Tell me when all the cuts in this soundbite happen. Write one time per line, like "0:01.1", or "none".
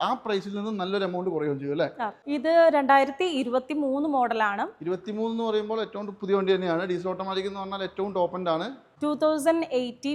0:02.2
0:08.9

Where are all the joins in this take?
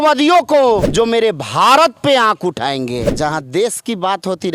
0:00.9
0:03.1

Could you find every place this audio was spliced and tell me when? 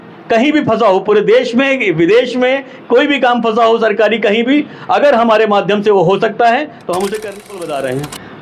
0:07.5

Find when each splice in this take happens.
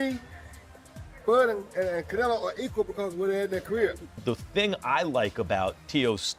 0:04.2

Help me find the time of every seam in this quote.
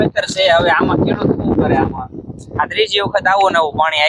none

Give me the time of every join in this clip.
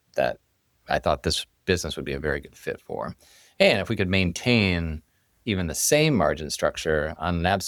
none

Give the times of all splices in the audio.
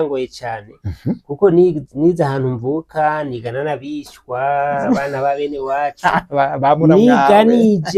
none

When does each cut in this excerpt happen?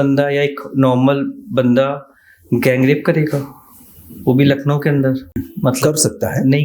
0:05.5

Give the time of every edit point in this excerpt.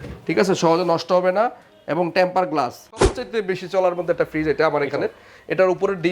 0:03.0

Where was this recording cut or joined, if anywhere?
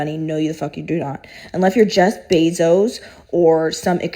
0:01.2

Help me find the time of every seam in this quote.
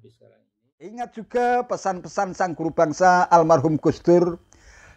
0:01.0

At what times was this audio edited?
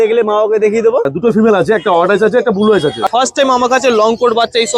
0:01.1
0:03.1

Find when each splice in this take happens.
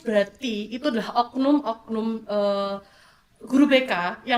none

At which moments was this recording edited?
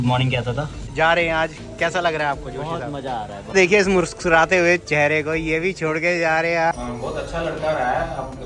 0:00.9
0:03.4
0:06.7

